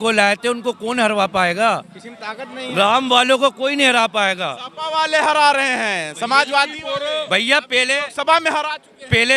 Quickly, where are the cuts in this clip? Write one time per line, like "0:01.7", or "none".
none